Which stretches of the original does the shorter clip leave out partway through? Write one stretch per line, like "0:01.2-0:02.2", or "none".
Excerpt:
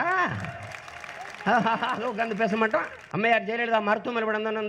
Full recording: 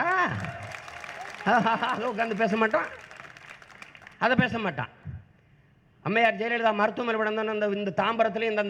0:03.0-0:05.9